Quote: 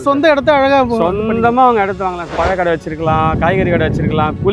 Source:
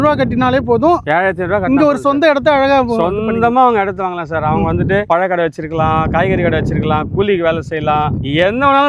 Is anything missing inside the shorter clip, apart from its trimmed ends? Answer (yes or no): yes